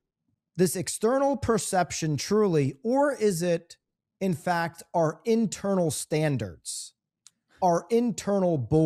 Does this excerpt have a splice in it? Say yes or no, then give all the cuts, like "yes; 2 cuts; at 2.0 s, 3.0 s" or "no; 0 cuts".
no; 0 cuts